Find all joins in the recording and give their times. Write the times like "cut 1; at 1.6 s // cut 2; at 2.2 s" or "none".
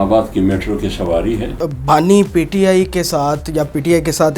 cut 1; at 1.7 s